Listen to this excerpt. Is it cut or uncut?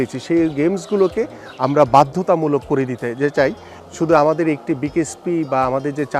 cut